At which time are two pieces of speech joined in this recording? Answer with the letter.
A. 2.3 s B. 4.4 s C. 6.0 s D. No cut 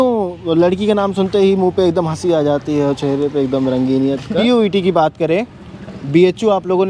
B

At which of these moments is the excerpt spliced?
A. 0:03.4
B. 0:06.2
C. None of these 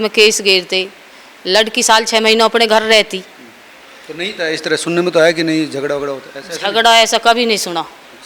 C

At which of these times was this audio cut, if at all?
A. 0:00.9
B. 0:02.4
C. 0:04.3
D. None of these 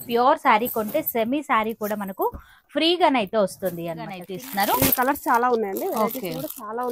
C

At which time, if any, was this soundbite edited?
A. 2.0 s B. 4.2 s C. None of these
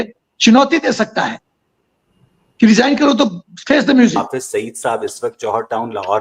B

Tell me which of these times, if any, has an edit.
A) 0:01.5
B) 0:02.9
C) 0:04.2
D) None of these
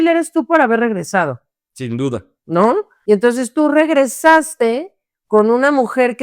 B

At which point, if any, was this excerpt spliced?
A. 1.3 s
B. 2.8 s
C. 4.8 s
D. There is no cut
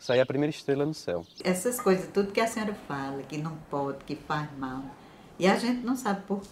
A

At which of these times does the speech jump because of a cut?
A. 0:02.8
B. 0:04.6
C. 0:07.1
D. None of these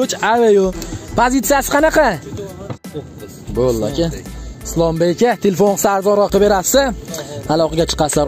A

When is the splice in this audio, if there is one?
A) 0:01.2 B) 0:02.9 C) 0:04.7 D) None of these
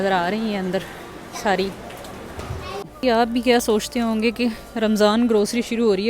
B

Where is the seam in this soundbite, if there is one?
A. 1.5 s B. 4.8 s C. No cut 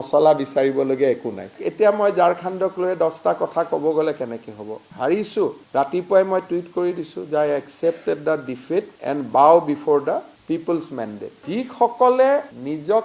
A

